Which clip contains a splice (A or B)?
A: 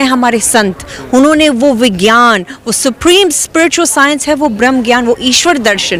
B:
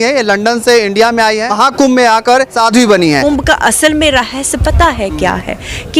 B